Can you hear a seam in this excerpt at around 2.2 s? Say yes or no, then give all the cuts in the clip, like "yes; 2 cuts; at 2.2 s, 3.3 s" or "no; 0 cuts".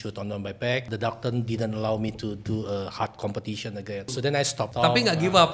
no; 2 cuts; at 0.9 s, 4.5 s